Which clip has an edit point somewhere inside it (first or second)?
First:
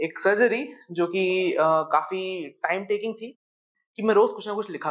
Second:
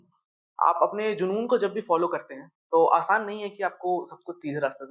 first